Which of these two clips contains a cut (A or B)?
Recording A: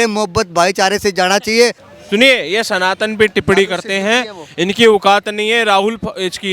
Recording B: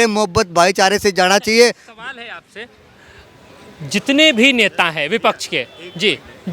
A